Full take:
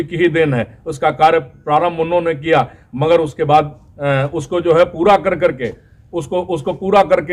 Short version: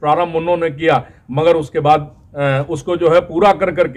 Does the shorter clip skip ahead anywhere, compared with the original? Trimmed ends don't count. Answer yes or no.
no